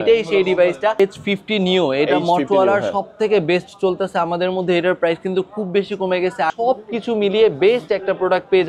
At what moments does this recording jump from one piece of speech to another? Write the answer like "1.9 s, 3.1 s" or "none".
1.0 s, 6.5 s